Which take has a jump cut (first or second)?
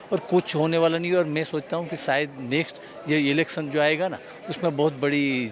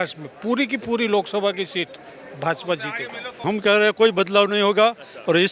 second